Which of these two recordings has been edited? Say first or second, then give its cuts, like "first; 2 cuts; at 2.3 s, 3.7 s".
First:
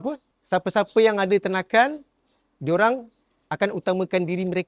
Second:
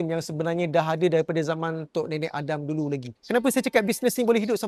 second; 1 cut; at 3.1 s